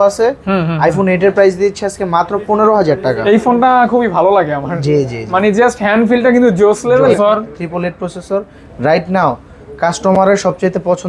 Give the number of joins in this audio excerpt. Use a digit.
1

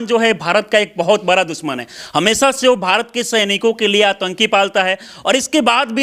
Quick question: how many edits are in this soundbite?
0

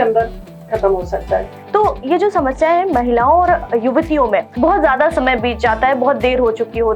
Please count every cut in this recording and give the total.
2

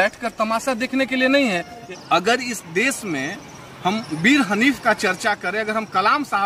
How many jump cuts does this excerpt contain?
1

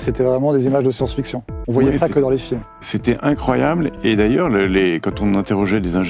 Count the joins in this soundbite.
0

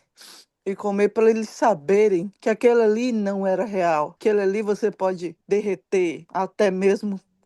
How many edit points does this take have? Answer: 4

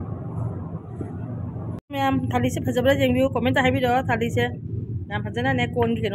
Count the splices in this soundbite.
1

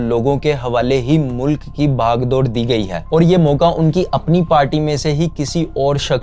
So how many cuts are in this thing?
1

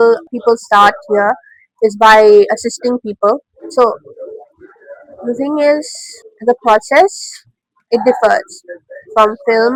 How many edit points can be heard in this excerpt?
0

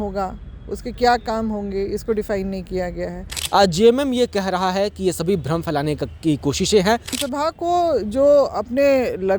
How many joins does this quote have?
2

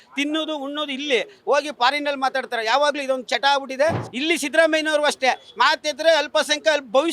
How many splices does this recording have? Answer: 1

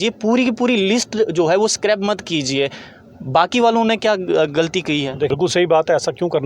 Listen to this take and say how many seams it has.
1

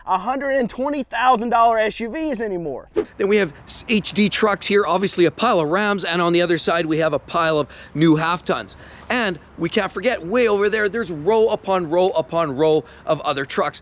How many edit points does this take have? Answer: 0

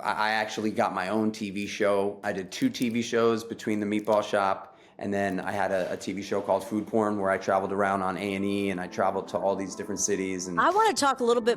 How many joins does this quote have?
1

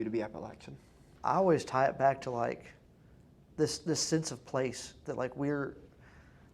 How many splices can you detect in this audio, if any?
1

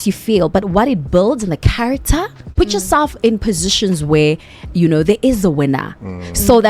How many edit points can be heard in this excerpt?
1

